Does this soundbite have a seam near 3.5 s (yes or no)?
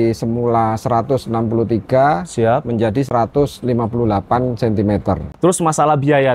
no